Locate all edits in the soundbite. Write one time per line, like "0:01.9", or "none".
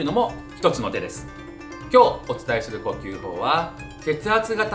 none